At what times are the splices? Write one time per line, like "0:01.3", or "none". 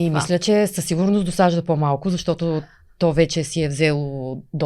none